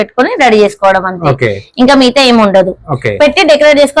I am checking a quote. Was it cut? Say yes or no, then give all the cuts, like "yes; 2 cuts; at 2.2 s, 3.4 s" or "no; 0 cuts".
no; 0 cuts